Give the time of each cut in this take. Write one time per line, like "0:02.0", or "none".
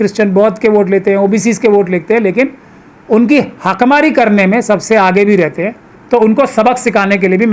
none